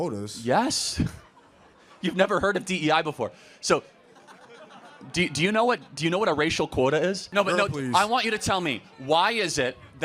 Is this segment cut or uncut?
cut